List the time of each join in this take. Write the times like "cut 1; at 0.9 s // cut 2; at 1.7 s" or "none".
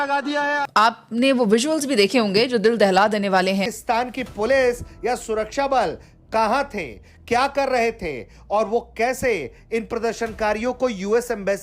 cut 1; at 3.6 s